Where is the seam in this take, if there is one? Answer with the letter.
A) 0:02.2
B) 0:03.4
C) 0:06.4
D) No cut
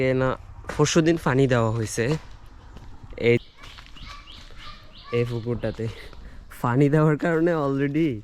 B